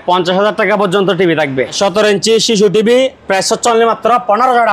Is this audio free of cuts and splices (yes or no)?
no